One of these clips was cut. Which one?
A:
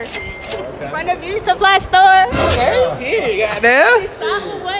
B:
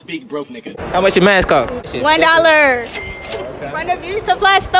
B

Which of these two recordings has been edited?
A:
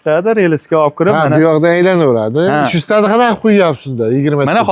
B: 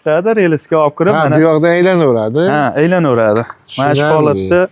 A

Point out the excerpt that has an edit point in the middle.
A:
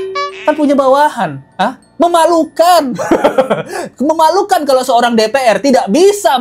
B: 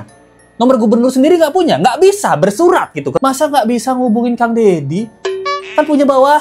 B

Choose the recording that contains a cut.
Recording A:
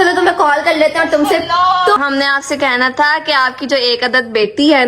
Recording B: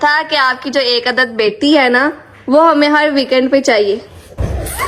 A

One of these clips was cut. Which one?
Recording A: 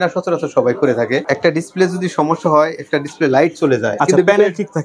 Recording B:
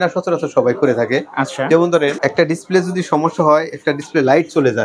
A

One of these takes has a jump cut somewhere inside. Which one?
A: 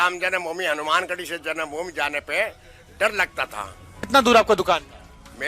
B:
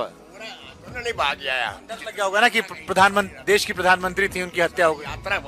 A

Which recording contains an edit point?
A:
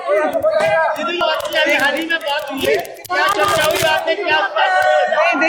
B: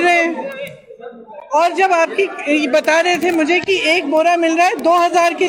A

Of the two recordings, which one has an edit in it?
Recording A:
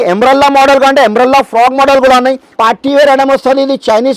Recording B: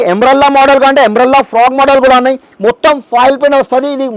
A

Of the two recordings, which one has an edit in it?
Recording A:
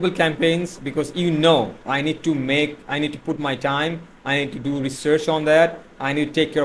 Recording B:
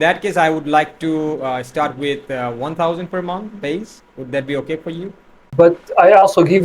B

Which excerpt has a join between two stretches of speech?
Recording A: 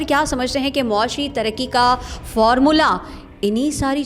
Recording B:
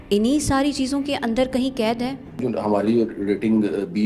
B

